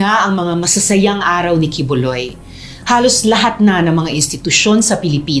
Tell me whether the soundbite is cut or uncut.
uncut